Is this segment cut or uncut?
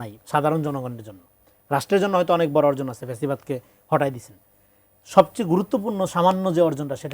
uncut